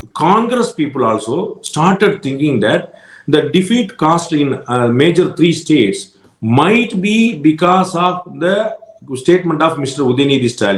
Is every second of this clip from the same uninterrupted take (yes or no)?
yes